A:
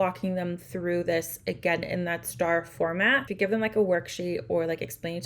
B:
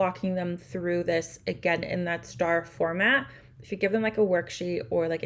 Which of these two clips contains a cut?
A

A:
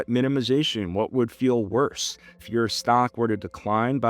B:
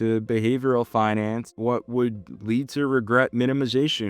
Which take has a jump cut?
A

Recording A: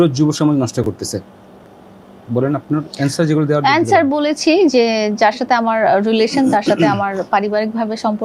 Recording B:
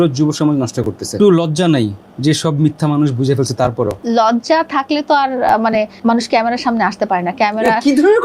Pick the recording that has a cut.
B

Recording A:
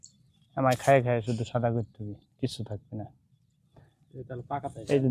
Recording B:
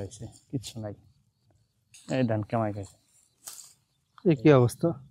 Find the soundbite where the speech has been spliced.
B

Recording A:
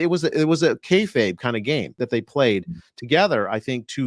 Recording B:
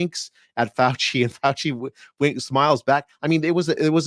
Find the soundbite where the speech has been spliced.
A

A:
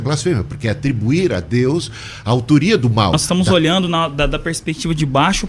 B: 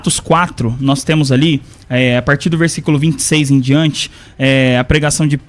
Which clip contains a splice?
A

